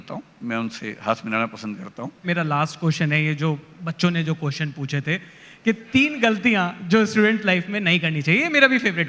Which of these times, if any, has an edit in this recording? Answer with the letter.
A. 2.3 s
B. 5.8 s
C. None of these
A